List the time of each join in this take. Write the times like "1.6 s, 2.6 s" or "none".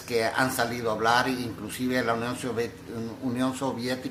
1.5 s